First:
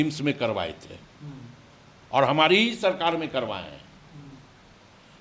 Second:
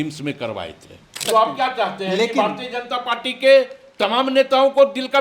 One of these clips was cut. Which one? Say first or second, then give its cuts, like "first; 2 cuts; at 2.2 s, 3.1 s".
second; 1 cut; at 1.2 s